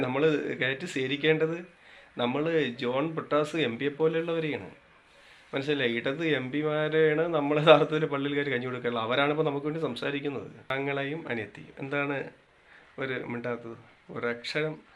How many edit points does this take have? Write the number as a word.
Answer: one